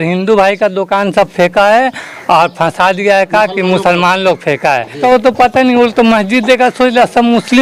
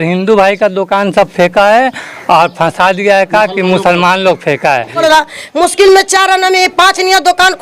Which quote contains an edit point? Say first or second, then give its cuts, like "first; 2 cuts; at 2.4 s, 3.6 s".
second; 1 cut; at 5.0 s